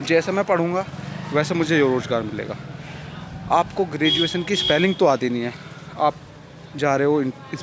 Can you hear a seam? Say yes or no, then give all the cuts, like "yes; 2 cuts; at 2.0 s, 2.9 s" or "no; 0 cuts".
no; 0 cuts